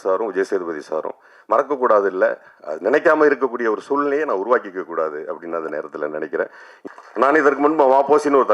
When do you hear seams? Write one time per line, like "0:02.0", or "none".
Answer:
0:06.7